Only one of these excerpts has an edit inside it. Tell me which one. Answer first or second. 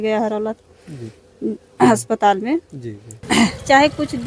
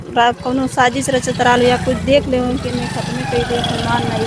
first